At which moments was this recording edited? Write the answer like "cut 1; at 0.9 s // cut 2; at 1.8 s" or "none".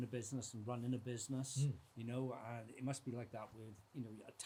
none